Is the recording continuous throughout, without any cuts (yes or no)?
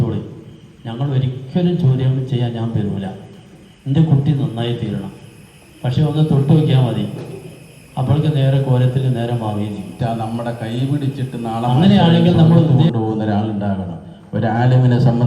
no